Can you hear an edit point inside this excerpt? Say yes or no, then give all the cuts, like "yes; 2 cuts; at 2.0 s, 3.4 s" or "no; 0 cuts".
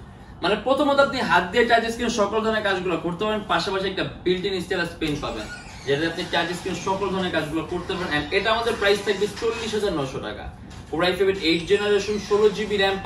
no; 0 cuts